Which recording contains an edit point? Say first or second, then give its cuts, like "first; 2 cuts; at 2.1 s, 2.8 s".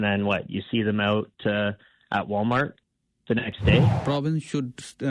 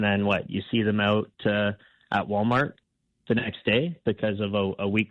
first; 1 cut; at 4.0 s